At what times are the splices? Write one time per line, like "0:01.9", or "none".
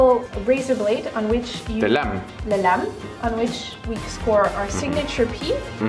none

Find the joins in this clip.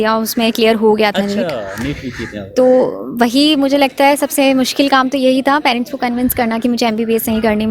none

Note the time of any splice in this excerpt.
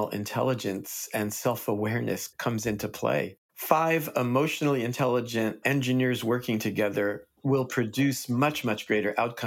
0:03.3

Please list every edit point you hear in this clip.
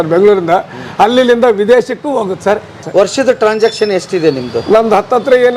0:02.8

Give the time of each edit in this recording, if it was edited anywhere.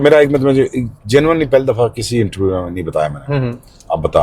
none

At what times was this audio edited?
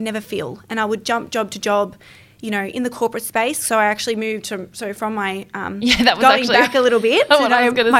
none

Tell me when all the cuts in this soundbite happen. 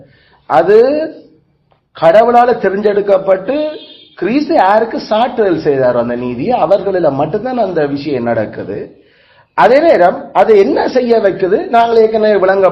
none

